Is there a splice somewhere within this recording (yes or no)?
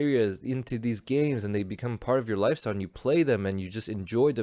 no